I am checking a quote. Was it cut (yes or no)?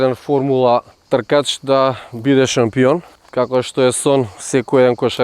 yes